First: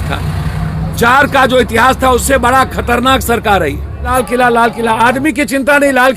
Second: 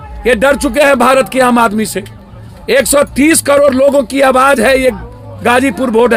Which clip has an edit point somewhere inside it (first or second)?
first